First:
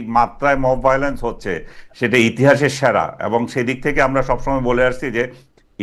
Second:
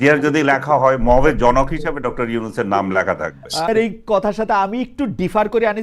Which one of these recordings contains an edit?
second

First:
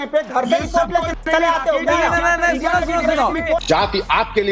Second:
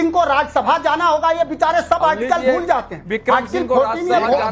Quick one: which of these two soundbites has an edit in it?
first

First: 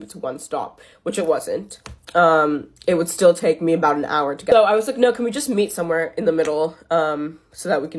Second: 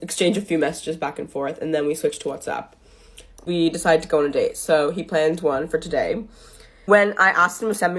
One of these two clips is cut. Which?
first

